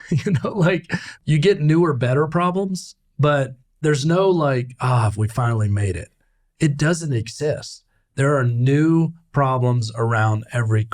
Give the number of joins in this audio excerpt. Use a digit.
2